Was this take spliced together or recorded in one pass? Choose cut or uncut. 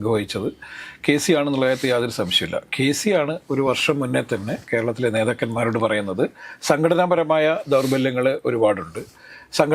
uncut